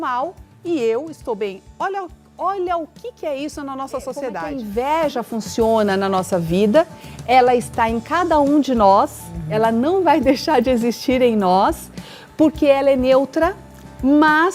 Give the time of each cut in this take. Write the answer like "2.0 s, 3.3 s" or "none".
4.5 s

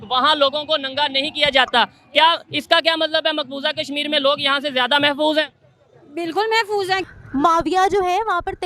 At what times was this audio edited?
7.0 s

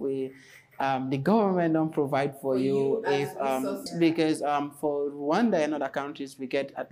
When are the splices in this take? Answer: 3.9 s

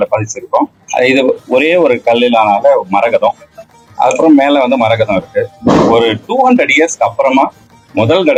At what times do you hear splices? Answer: none

